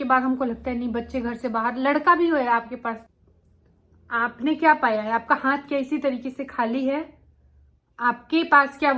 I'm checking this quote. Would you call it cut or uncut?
cut